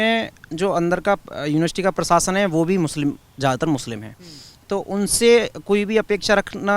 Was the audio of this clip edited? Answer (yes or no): no